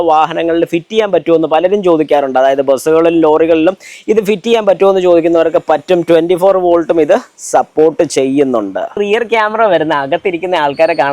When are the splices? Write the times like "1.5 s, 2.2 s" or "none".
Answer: 9.0 s